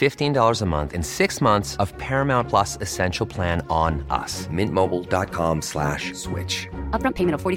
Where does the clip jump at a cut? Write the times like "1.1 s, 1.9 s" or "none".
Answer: none

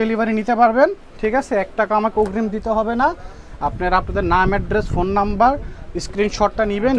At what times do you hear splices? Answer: none

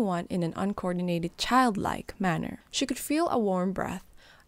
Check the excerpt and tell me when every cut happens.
2.6 s

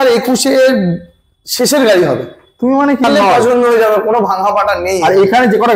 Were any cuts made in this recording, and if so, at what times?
3.0 s

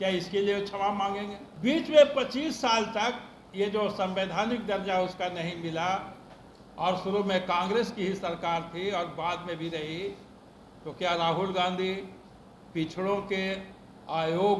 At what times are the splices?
1.4 s

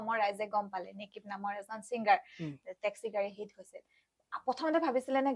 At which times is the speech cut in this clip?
none

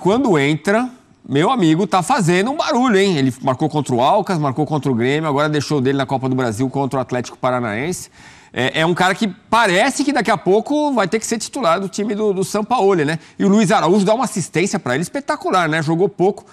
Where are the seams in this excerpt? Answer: none

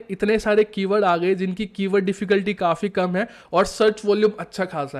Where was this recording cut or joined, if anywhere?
none

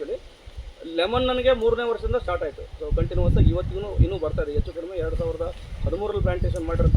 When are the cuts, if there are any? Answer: none

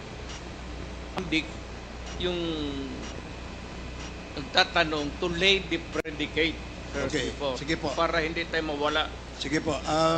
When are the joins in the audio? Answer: 1.2 s

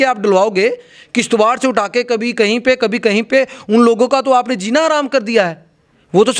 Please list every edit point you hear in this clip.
none

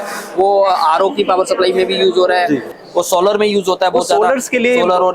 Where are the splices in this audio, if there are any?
2.7 s

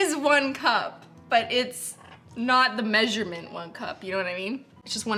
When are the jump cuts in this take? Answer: none

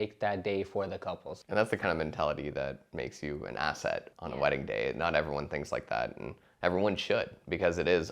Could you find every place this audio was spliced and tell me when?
1.3 s, 2.8 s, 4.1 s

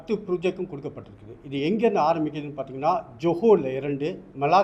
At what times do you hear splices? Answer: none

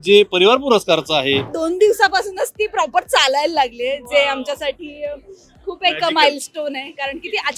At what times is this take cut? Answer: 1.5 s

